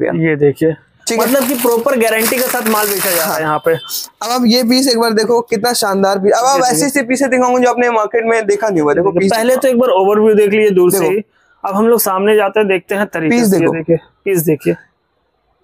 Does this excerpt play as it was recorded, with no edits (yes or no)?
yes